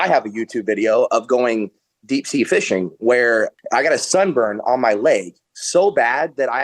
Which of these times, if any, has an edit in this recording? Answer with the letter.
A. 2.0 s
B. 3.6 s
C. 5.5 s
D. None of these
B